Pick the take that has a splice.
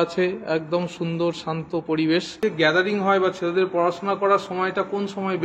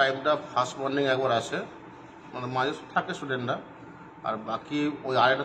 first; 1 cut; at 2.8 s

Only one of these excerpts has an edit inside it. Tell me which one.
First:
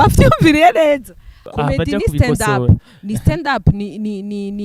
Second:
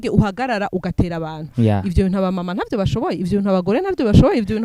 first; 1 cut; at 1.4 s

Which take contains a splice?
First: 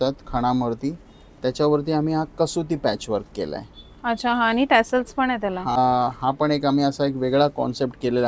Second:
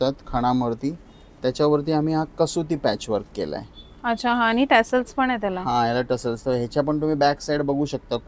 first; 1 cut; at 5.8 s

